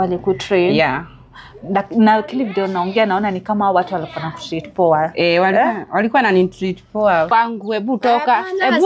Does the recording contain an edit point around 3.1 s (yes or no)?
no